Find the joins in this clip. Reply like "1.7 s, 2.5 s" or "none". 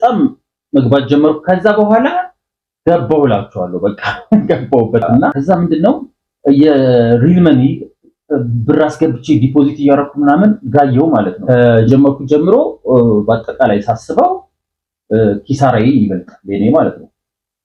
5.4 s, 11.4 s